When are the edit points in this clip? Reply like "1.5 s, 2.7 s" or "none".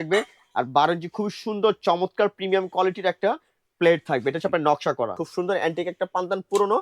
5.2 s